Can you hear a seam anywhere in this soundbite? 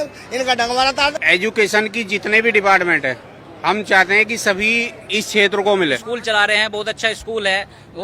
yes; 2 cuts; at 1.1 s, 6.0 s

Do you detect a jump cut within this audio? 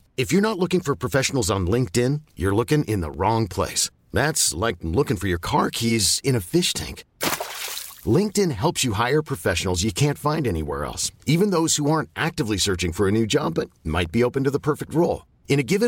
no; 0 cuts

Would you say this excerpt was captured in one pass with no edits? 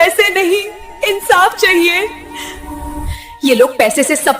no; 1 cut; at 2.3 s

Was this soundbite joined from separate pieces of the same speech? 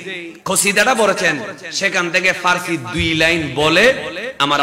no; 0 cuts

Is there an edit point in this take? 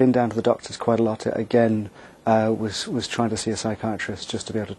no; 0 cuts

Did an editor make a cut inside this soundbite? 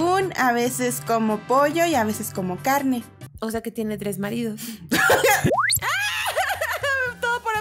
yes; 1 cut; at 5.6 s

